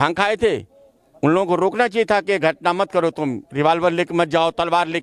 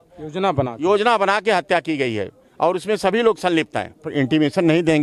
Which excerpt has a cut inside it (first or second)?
second